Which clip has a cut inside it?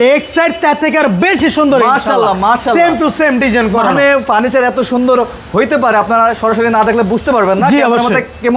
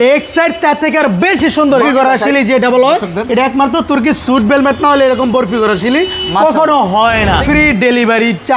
second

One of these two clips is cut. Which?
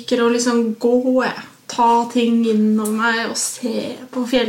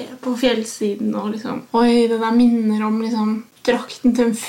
second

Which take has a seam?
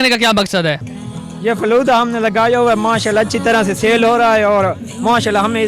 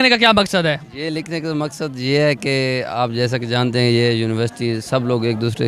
first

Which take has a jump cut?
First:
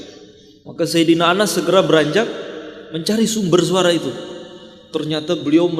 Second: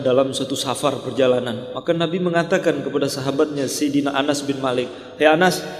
second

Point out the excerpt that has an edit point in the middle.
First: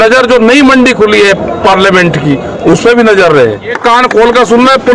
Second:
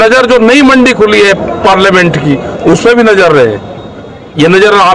first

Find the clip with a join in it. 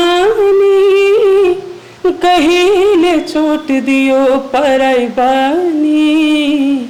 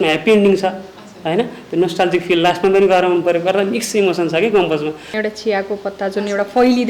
second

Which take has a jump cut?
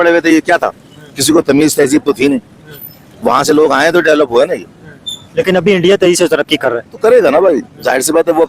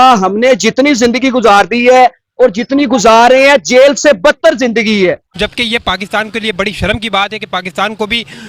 second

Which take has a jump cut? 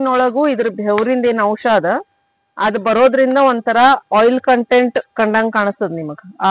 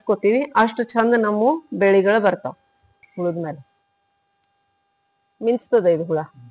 second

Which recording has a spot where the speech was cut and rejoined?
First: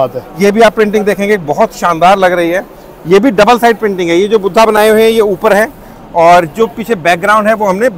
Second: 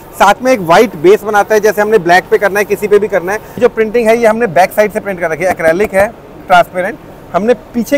second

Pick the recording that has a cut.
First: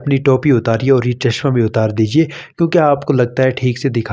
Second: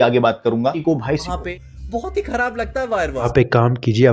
second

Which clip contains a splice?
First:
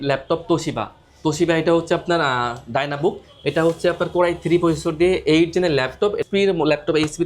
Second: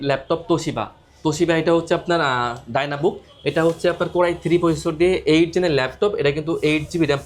first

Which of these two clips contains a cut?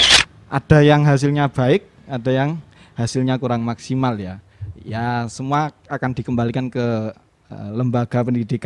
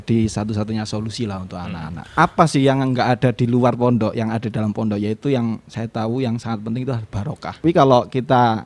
second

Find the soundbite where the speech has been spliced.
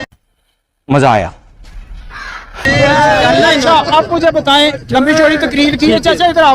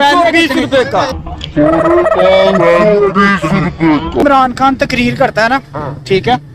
second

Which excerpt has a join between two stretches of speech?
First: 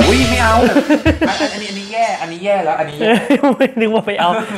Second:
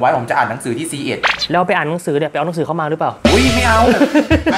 second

